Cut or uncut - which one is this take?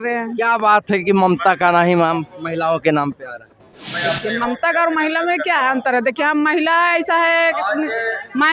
uncut